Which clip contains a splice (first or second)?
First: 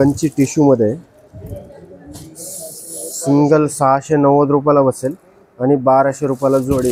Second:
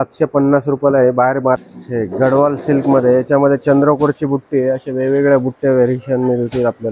second